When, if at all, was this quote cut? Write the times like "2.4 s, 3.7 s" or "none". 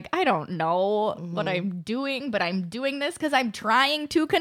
none